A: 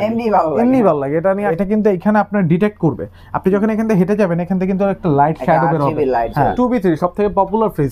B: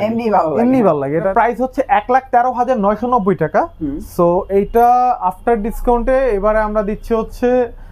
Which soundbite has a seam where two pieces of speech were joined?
A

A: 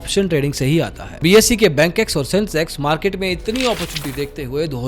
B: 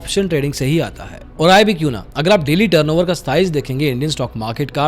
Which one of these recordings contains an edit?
A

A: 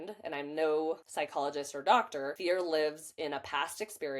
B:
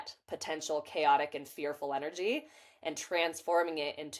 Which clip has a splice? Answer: A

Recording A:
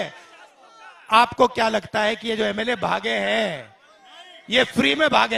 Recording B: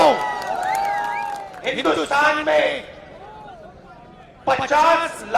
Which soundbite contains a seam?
B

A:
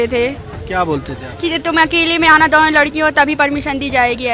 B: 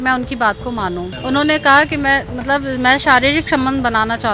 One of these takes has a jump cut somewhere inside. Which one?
B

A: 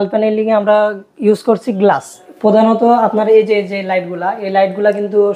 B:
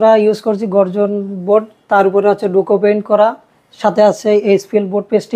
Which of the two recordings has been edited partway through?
A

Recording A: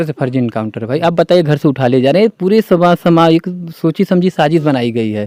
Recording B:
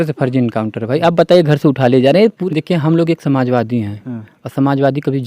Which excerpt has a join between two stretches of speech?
B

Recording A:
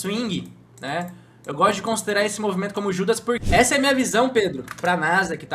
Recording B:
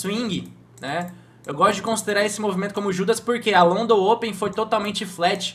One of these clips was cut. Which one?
A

